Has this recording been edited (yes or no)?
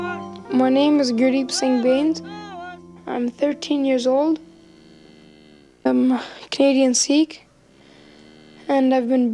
yes